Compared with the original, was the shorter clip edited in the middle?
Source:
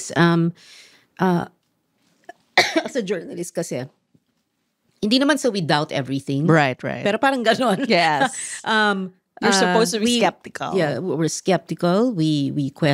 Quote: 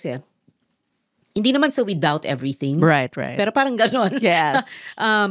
no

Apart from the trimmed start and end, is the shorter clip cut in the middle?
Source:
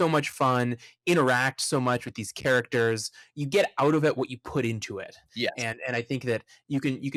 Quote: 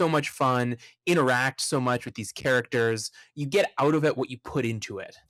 no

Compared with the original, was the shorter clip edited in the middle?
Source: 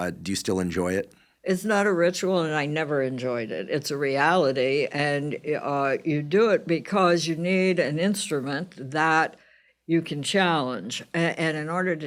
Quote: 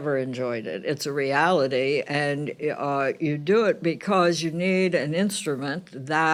no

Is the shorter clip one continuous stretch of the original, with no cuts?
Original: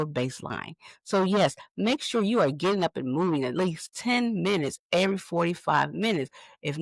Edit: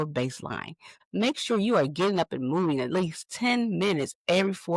no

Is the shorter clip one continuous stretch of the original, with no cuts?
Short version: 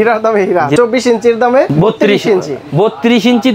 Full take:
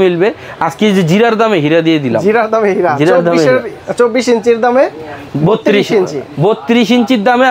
no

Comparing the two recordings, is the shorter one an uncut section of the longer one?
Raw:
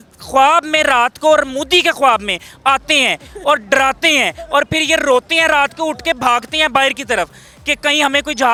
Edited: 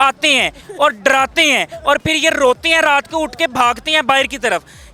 yes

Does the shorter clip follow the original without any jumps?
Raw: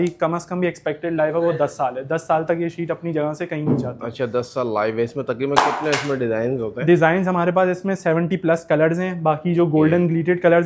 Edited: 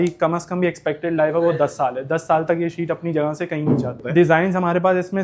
no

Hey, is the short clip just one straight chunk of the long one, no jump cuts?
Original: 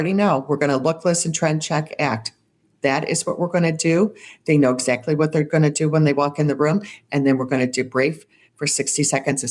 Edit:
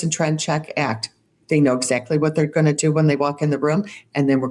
no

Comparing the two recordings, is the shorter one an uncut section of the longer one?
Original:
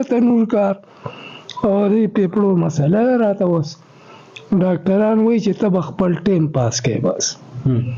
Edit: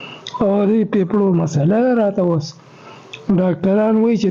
yes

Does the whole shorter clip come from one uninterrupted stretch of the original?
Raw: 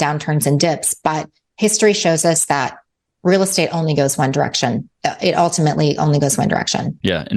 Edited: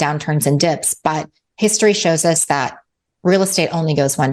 yes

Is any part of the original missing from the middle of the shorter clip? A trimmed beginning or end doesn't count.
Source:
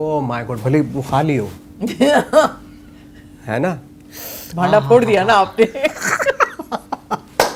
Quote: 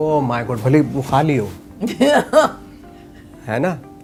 no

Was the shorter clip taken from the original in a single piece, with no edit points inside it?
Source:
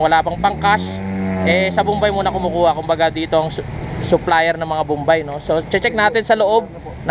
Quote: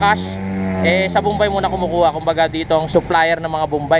no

